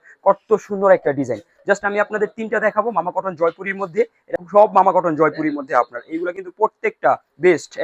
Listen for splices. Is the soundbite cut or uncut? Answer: cut